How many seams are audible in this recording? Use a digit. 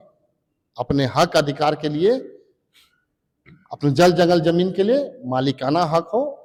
0